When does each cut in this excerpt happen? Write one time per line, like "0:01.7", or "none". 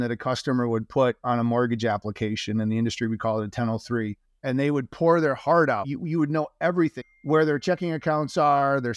0:04.3
0:05.9
0:07.0